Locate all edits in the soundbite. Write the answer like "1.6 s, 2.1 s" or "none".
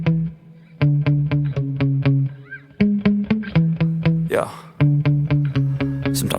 none